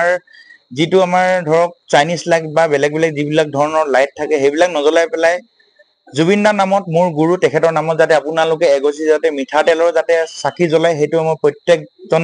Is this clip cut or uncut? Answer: uncut